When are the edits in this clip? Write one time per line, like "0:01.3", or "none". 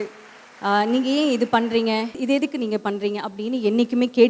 0:02.2